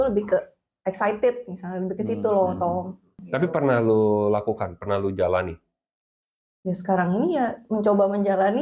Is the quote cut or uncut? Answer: cut